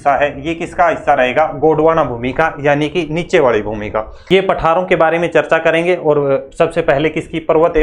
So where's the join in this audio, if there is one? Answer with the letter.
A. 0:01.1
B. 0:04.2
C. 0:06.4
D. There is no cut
B